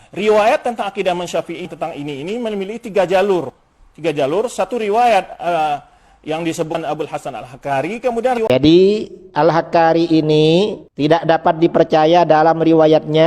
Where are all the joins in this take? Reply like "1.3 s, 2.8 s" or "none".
8.5 s